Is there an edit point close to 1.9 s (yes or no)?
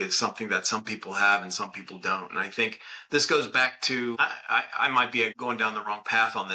no